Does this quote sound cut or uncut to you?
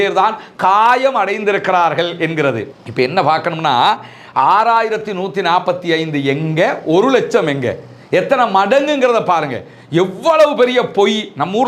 uncut